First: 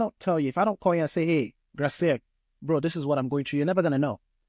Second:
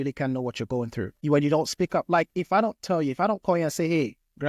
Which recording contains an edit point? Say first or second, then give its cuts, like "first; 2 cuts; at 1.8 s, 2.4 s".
second; 1 cut; at 1.1 s